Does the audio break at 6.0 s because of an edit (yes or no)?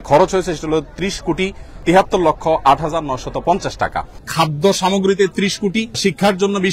yes